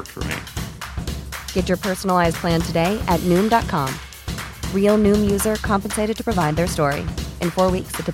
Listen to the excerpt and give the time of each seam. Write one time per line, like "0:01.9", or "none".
none